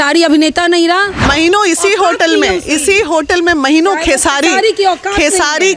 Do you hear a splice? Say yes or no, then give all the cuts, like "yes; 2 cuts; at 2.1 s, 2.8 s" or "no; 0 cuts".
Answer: yes; 1 cut; at 1.2 s